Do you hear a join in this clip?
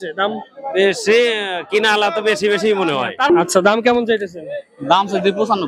yes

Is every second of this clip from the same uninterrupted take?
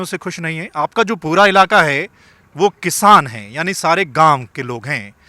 yes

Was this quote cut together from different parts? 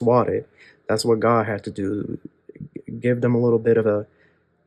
no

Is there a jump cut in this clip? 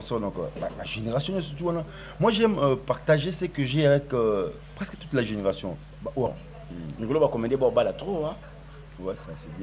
yes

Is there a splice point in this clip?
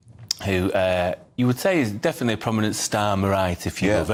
no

